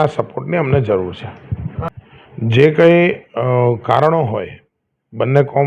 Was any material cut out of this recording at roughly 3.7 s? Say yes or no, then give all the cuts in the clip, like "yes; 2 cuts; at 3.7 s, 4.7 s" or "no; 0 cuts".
no; 1 cut; at 2.4 s